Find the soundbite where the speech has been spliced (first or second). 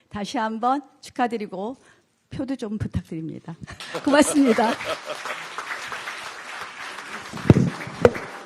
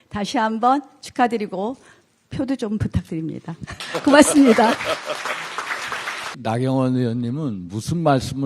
second